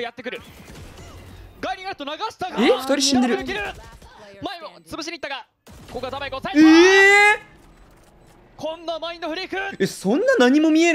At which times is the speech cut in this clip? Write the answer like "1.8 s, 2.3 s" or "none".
none